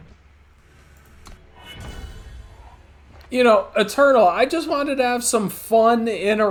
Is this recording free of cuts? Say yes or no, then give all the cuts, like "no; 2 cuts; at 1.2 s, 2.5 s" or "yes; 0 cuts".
yes; 0 cuts